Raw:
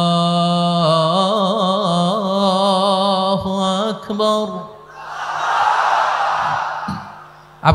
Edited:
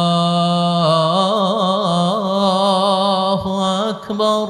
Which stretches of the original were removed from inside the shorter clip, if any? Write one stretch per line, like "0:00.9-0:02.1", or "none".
none